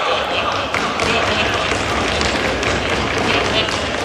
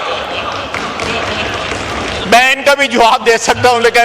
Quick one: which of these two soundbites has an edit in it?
second; 1 cut; at 2.2 s

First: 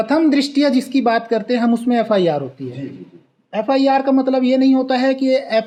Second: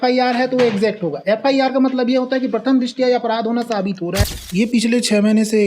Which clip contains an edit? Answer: second; 1 cut; at 4.2 s

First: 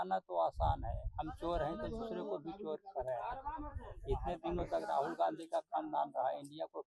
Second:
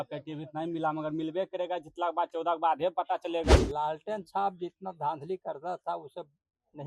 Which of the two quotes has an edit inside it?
second; 1 cut; at 3.5 s

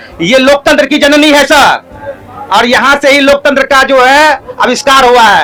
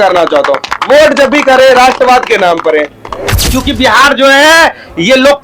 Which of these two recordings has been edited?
second; 1 cut; at 3.5 s

